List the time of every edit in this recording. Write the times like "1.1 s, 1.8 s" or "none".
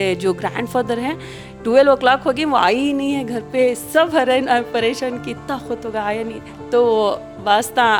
none